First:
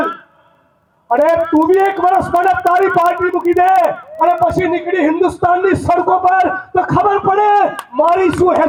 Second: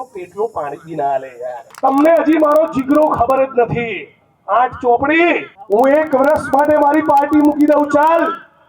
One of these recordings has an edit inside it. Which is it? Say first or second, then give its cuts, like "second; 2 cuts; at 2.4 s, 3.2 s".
second; 2 cuts; at 1.7 s, 5.5 s